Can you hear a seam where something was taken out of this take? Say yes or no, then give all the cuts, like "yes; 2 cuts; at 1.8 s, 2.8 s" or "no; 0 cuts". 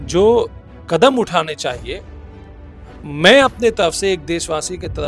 no; 0 cuts